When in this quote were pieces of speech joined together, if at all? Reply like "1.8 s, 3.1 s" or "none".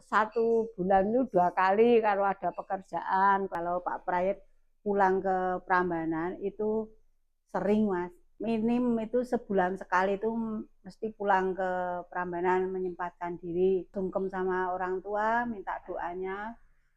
3.5 s, 8.2 s, 13.9 s